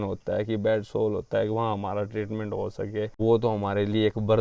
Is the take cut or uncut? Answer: cut